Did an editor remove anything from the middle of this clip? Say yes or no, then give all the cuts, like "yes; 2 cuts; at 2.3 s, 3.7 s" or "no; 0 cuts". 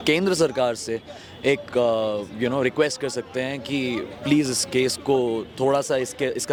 no; 0 cuts